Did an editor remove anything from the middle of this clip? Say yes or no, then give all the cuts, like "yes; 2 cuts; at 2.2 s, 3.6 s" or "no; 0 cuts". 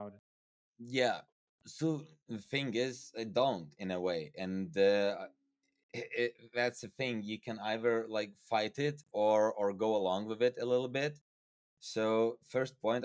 no; 0 cuts